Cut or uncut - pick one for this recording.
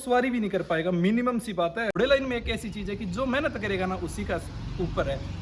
cut